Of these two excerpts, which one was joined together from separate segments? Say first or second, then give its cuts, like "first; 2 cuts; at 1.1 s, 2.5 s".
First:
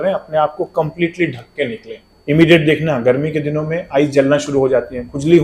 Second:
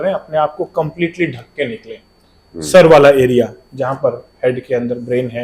first; 1 cut; at 2.1 s